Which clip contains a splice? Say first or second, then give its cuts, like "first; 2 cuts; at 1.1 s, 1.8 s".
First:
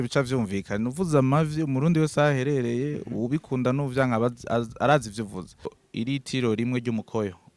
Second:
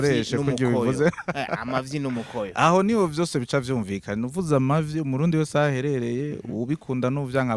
first; 1 cut; at 5.8 s